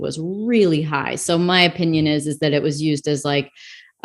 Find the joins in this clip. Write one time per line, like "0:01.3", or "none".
none